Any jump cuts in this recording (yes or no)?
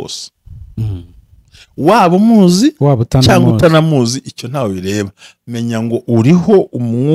no